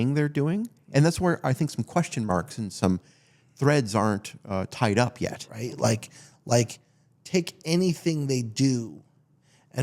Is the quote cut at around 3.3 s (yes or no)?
no